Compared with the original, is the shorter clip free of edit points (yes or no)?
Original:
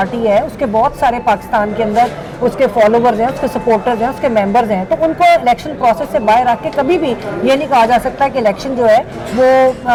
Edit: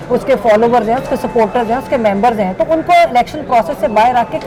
yes